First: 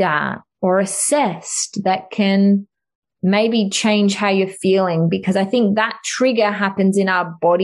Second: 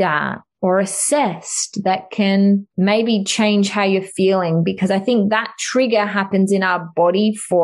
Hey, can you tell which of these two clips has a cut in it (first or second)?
second